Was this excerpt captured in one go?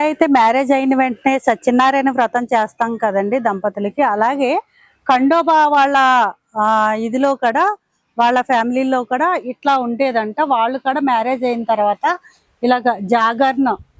yes; 0 cuts

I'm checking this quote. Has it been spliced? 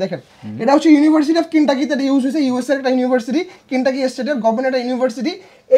no; 0 cuts

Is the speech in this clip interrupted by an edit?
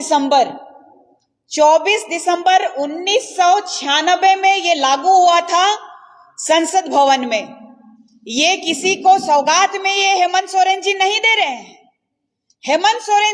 no; 0 cuts

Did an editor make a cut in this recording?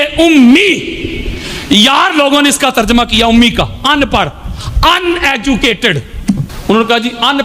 yes; 1 cut; at 6.5 s

